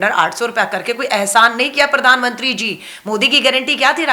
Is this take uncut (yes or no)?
yes